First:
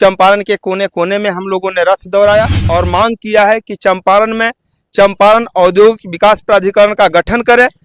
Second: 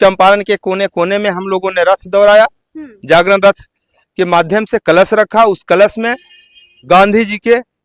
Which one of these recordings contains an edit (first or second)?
first